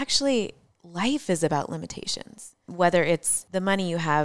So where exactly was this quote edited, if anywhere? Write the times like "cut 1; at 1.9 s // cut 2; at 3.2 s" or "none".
cut 1; at 2.6 s // cut 2; at 3.4 s